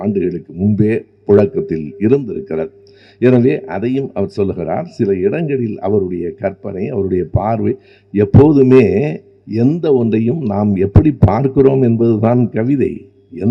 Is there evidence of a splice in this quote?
no; 0 cuts

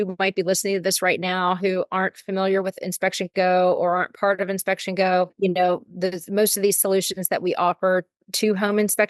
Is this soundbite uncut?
yes; 0 cuts

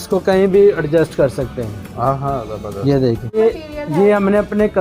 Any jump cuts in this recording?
yes; 1 cut; at 3.4 s

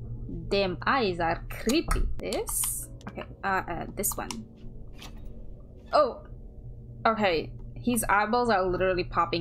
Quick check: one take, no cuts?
yes; 0 cuts

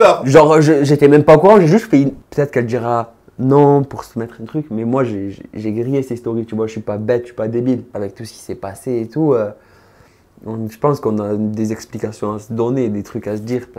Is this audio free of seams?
no; 2 cuts; at 2.2 s, 7.9 s

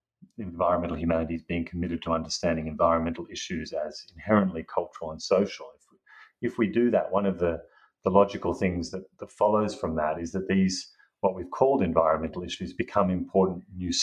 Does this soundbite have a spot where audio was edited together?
no; 0 cuts

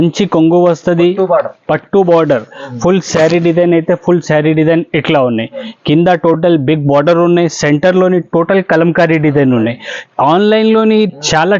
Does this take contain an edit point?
no; 0 cuts

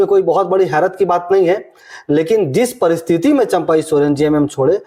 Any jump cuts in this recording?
no; 0 cuts

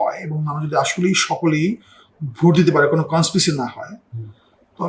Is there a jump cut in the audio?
no; 0 cuts

